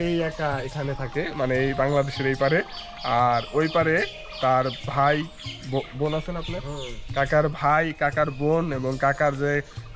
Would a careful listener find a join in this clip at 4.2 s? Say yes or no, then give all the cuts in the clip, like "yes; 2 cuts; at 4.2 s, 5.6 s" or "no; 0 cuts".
no; 0 cuts